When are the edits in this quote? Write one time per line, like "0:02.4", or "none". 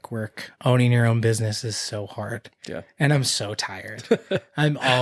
none

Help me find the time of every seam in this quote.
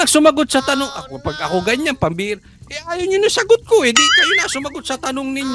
none

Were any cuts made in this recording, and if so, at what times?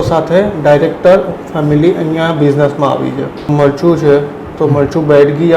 0:03.5

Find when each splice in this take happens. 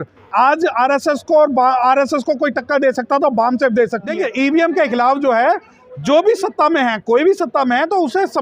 0:04.1

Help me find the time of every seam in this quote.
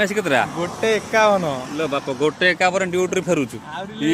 none

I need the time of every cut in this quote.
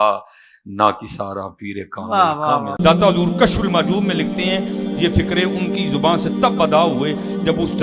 0:02.7

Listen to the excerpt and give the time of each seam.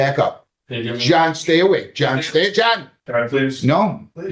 0:02.9

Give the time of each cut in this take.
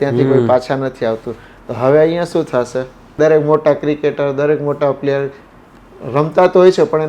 0:03.1

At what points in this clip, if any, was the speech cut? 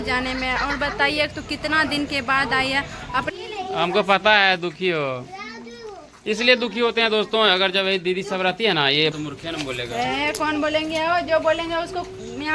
0:03.3
0:09.1

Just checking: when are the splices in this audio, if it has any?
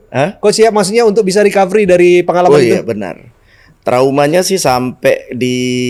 none

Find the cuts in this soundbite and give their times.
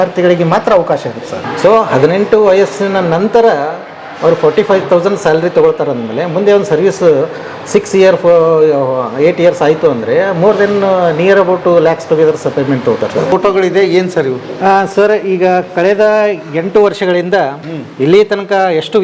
0:01.5
0:13.3

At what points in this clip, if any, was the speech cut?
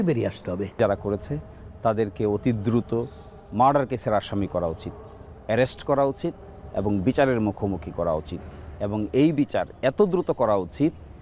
none

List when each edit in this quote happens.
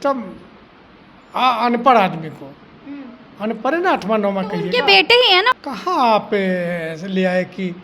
0:05.5

